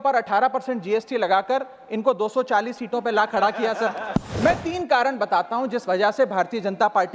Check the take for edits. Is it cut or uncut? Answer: cut